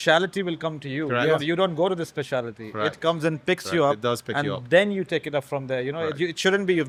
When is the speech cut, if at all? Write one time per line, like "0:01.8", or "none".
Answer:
none